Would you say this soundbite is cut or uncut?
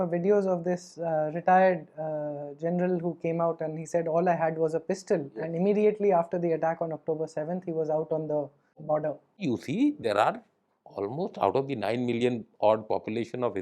cut